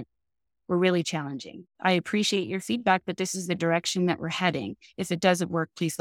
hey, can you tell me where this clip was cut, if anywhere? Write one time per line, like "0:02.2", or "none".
0:01.5